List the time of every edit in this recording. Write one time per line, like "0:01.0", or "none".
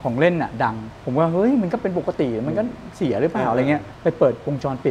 0:00.9
0:03.9